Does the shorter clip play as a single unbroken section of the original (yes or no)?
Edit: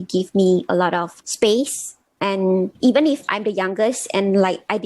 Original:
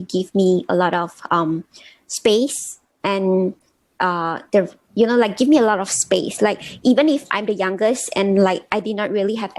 no